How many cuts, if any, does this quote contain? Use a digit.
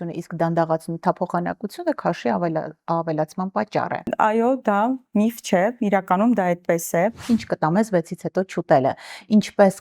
1